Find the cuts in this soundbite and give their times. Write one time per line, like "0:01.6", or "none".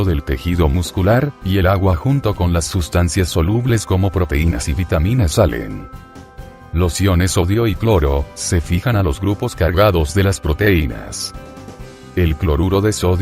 0:08.1